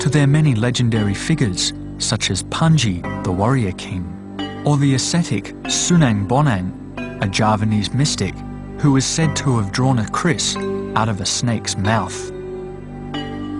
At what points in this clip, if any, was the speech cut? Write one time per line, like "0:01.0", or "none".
0:05.7